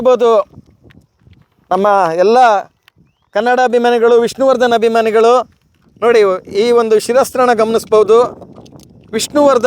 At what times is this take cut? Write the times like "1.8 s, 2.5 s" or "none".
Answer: none